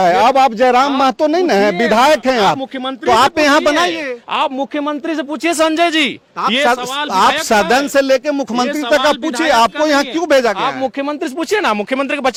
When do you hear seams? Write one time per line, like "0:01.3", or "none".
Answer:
none